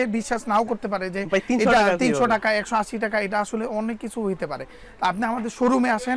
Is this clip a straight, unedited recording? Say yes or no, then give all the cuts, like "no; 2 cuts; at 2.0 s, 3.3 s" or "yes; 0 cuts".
yes; 0 cuts